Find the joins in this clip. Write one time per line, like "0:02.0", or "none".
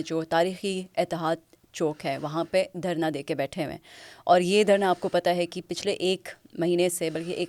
none